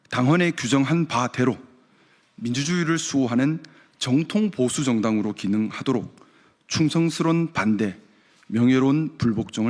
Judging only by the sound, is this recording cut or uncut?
cut